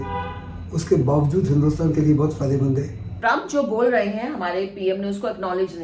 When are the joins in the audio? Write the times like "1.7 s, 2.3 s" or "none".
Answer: 3.1 s